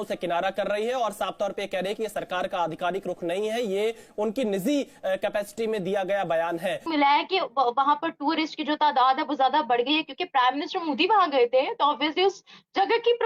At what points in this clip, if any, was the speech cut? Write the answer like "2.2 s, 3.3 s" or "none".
6.8 s